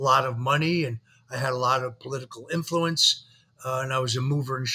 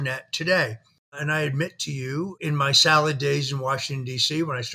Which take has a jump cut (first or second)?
second